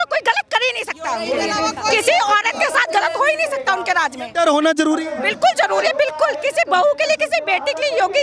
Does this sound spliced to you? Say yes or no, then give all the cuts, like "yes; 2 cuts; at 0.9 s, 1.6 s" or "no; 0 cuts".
no; 0 cuts